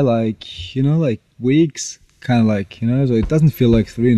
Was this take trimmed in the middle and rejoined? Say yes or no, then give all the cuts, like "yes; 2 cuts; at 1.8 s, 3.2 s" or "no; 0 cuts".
no; 0 cuts